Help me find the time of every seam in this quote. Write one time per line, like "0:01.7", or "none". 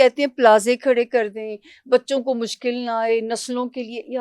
none